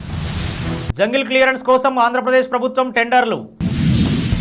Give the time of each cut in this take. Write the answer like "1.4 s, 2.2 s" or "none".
none